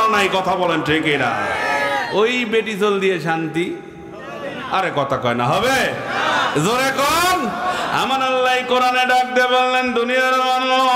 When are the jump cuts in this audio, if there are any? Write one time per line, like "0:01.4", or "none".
none